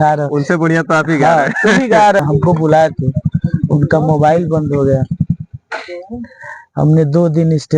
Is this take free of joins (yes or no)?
no